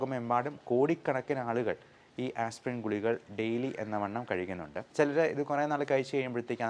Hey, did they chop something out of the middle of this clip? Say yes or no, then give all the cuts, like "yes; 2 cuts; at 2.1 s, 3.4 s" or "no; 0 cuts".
yes; 1 cut; at 4.7 s